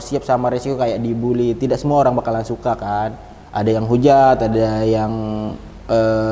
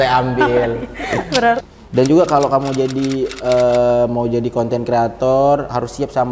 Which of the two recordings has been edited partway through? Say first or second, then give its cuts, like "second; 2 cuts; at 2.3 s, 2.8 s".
second; 1 cut; at 1.6 s